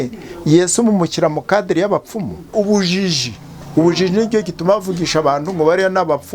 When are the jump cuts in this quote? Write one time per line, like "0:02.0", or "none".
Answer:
0:02.5